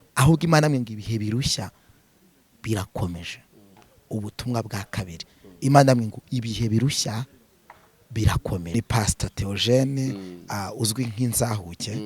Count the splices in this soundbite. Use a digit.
1